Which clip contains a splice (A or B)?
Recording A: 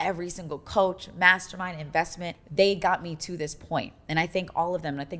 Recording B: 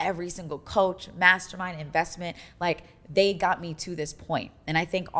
A